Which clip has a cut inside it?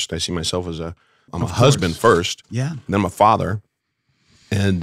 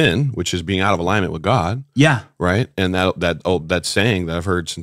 first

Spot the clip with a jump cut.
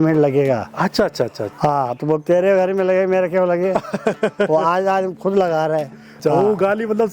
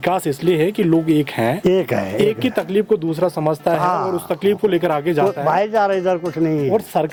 first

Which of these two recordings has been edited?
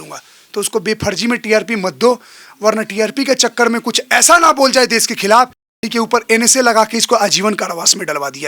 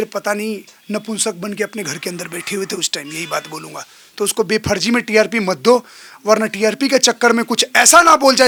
first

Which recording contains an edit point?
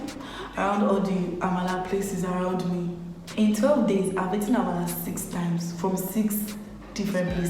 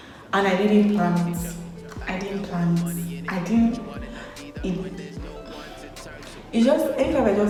first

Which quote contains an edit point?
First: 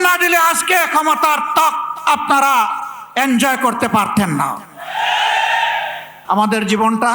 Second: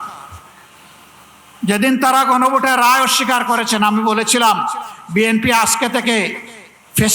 first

